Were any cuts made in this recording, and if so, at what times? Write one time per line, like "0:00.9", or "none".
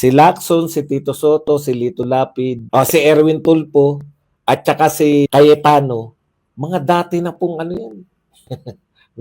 0:02.6
0:05.3